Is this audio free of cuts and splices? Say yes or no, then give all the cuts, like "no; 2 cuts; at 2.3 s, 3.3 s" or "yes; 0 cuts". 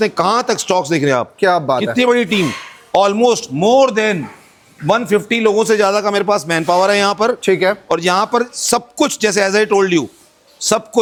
yes; 0 cuts